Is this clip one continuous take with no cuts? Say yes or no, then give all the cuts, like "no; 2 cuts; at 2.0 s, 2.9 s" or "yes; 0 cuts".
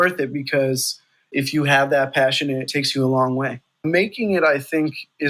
no; 3 cuts; at 1.3 s, 2.7 s, 3.8 s